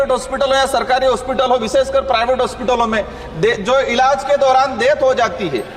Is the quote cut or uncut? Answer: uncut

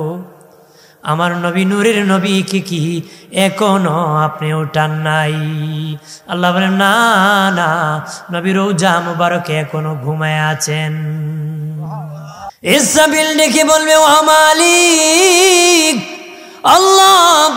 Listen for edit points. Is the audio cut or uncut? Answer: cut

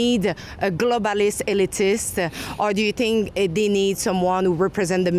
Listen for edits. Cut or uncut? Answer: uncut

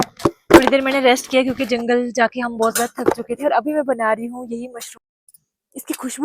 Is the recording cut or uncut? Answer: cut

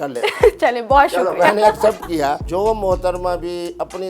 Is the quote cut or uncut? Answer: cut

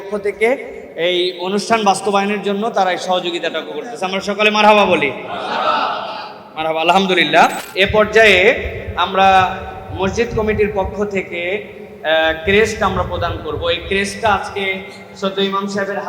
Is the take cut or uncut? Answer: cut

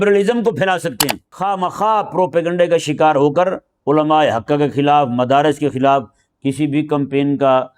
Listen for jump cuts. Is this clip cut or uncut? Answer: cut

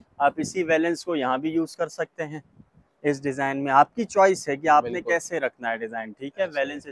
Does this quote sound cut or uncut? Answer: uncut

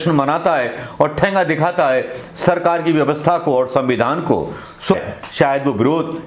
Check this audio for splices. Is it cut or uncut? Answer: cut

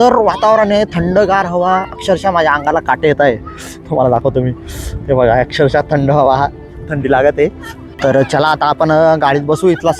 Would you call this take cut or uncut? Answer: cut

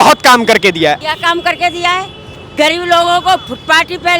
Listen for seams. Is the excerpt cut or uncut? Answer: cut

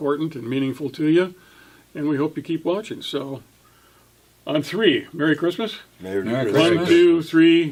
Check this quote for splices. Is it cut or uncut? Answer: uncut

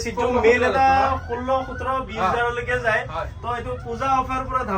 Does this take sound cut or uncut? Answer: uncut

